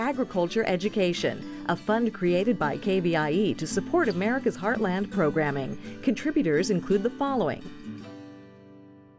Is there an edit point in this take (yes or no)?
yes